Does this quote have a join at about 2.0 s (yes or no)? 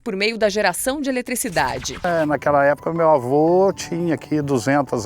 yes